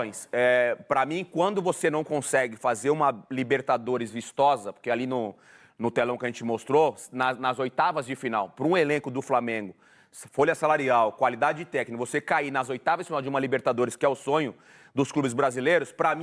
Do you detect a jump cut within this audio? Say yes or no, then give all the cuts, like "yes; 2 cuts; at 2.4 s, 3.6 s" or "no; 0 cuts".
no; 0 cuts